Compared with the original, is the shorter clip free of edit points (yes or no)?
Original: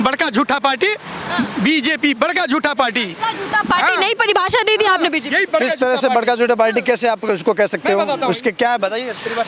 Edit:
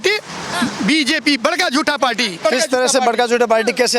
no